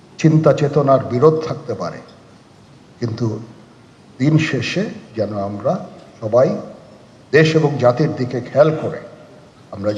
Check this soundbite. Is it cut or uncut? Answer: uncut